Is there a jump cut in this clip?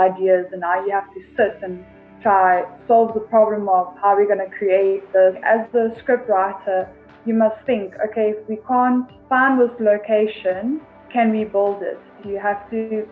yes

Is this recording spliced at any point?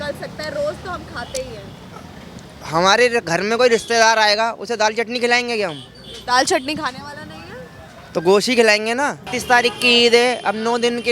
yes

